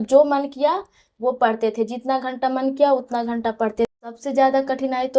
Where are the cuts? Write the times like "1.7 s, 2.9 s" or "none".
3.9 s